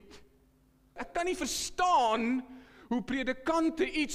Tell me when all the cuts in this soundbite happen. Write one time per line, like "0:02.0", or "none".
0:01.0